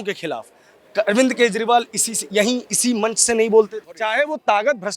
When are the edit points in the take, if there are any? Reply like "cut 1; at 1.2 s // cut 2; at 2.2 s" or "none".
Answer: cut 1; at 3.9 s